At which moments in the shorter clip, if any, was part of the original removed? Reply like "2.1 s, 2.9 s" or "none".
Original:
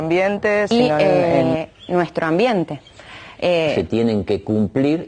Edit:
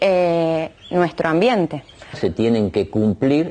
2.2 s